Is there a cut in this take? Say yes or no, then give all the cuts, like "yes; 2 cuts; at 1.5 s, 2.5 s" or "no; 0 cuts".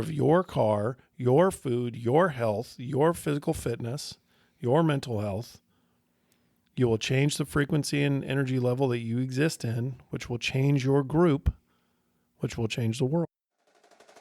yes; 1 cut; at 13.3 s